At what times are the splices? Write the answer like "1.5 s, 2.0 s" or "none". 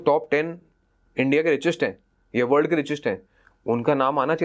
none